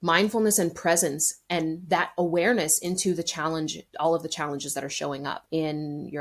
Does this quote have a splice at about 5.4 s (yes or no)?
yes